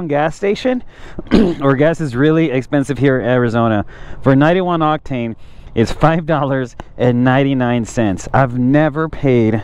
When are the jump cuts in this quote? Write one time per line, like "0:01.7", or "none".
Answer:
none